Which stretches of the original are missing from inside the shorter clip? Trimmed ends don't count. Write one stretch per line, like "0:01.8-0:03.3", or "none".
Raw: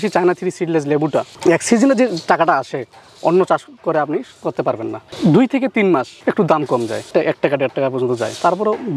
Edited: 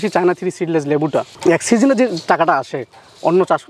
none